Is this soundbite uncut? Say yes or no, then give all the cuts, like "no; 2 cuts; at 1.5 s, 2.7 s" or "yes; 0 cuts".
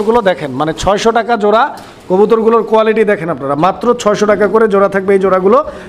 yes; 0 cuts